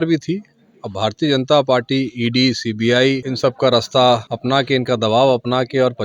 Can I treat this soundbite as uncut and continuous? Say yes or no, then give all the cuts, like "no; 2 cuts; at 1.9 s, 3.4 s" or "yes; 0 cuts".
no; 2 cuts; at 3.3 s, 4.3 s